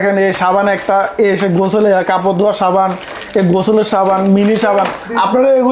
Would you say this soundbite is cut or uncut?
uncut